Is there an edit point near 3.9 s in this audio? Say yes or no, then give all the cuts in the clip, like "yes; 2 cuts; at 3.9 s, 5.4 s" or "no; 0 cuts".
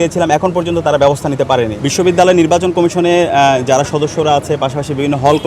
no; 1 cut; at 1.8 s